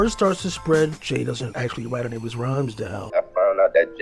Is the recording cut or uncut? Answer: cut